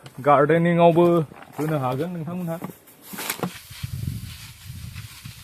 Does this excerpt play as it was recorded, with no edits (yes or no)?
no